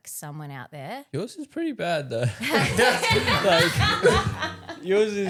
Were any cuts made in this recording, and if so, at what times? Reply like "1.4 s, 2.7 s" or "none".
none